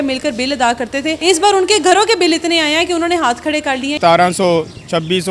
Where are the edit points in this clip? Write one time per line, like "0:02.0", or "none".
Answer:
0:01.2
0:03.9